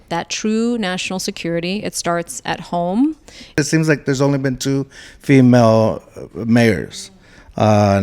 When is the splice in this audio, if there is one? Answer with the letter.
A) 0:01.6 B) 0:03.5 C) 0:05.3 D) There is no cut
B